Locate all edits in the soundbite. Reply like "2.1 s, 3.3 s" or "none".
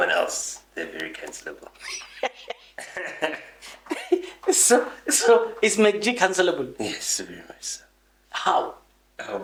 none

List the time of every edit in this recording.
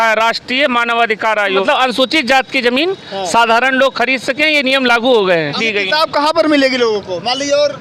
1.6 s, 5.6 s

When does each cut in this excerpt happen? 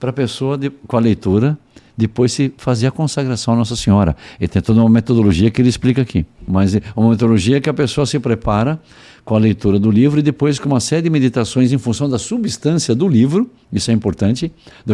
6.4 s

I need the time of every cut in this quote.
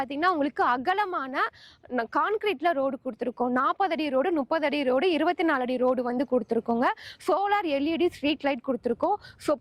none

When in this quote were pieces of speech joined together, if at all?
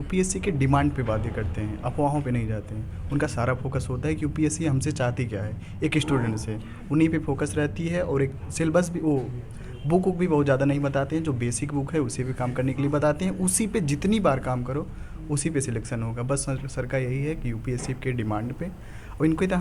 none

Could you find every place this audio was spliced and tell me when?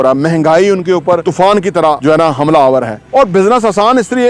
1.2 s, 2.0 s, 3.0 s

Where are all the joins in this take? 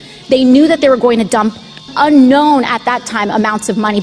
1.9 s

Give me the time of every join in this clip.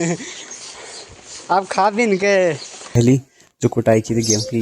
3.0 s

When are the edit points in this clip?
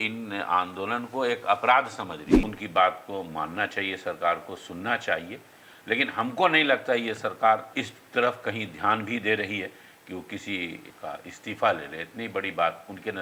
2.3 s, 7.7 s, 10.9 s

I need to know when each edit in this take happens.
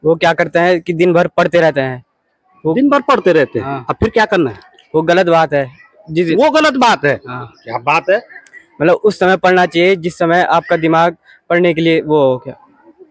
none

